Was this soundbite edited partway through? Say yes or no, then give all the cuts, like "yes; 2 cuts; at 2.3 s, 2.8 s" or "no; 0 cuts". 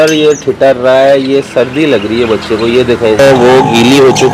yes; 1 cut; at 3.2 s